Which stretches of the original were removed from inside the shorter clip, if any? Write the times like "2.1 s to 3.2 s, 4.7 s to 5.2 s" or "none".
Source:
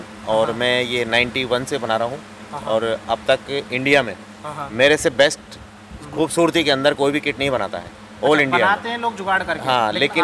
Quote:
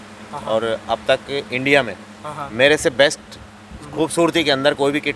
none